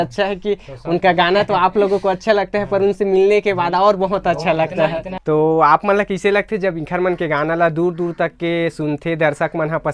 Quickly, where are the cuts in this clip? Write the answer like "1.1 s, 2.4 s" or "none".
5.1 s

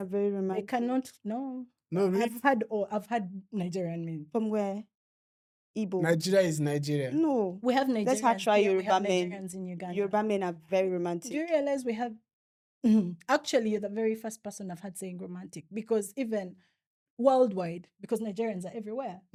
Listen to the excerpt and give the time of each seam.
none

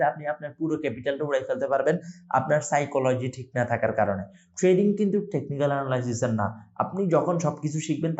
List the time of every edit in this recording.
none

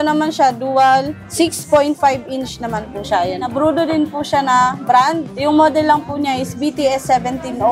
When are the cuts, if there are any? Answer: 1.2 s, 3.5 s, 5.3 s

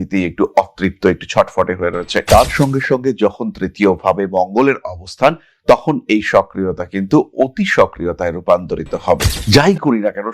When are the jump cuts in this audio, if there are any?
9.3 s

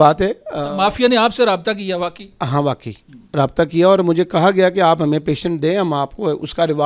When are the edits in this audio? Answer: none

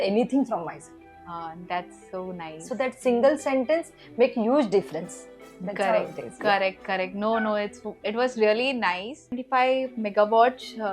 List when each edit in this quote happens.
9.4 s

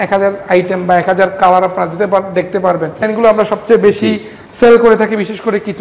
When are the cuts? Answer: 3.1 s

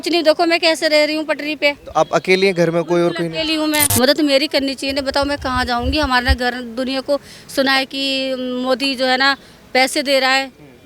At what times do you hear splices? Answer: 3.9 s

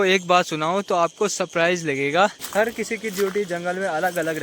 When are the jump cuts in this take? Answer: 2.4 s

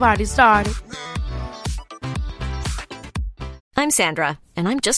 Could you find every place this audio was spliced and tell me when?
3.6 s

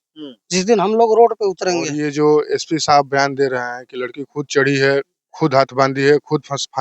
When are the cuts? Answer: 2.0 s

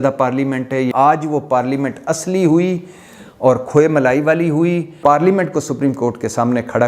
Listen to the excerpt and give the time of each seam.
0.9 s, 5.0 s

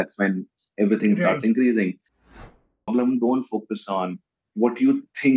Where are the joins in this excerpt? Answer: 2.3 s

